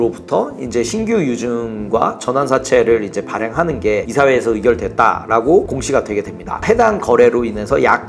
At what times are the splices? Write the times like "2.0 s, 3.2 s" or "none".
6.6 s